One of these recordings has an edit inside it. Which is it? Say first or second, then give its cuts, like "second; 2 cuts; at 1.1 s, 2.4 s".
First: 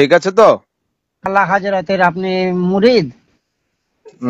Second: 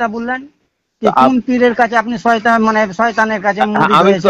first; 1 cut; at 1.3 s